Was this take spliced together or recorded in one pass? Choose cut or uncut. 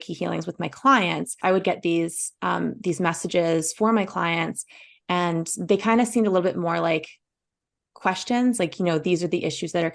cut